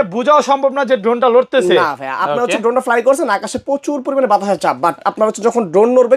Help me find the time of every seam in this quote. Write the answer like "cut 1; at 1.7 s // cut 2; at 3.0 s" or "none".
none